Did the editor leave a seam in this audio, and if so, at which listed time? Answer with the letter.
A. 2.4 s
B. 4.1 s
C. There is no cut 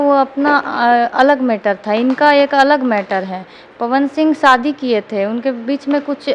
C